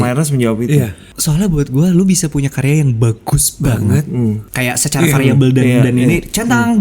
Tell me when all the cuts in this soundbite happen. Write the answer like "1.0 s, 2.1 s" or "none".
1.1 s, 4.5 s